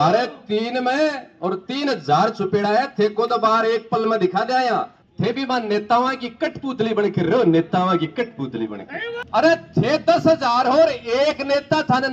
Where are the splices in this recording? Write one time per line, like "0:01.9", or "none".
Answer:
0:05.0
0:09.2